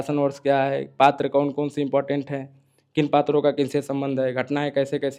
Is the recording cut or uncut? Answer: uncut